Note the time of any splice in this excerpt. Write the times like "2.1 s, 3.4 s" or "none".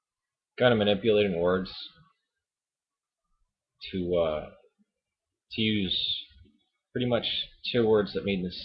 none

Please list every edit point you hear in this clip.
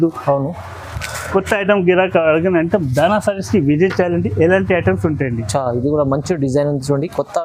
none

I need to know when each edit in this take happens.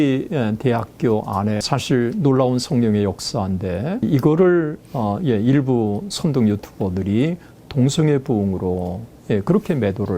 1.6 s, 4.0 s

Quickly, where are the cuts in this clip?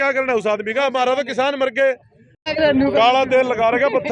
2.3 s

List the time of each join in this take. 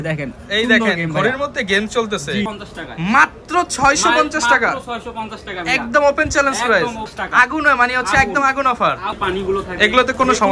2.5 s, 7.1 s, 9.2 s

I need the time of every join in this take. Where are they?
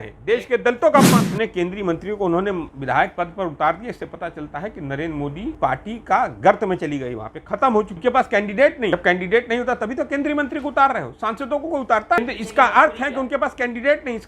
1.2 s, 5.6 s, 7.9 s, 8.9 s, 12.2 s

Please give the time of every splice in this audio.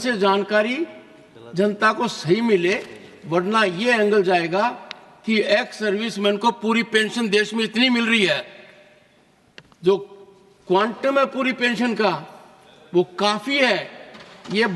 none

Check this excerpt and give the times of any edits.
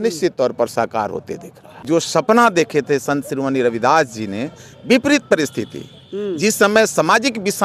1.7 s

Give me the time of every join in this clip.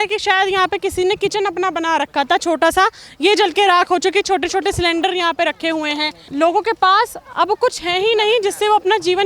6.2 s

